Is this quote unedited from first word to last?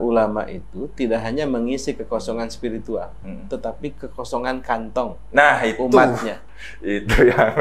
yes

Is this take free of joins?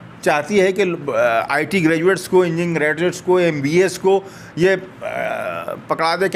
yes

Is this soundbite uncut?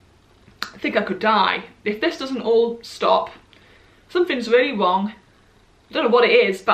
yes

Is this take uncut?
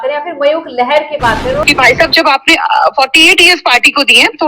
no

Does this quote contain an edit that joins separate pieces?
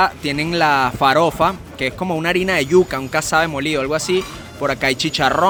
no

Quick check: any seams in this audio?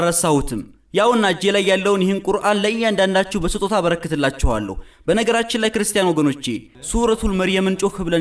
yes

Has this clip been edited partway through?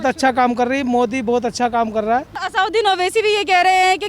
yes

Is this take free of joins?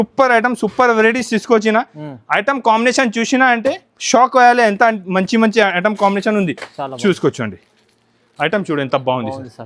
yes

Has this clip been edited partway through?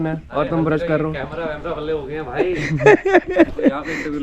no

